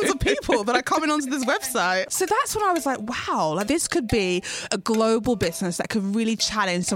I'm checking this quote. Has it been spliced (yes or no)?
yes